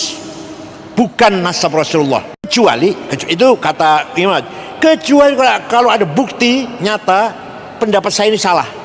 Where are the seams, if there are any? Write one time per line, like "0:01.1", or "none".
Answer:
0:02.5